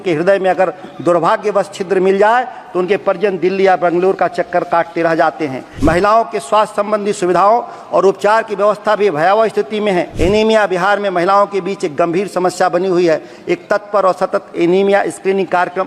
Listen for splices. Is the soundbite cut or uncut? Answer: cut